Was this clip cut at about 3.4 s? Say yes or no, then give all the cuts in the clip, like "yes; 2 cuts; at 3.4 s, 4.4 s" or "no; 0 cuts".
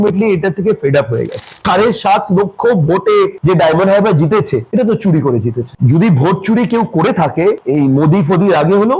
no; 2 cuts; at 1.6 s, 5.7 s